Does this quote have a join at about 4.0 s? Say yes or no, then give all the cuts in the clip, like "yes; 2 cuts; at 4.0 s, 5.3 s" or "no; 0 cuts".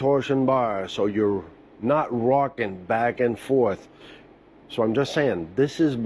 yes; 1 cut; at 4.0 s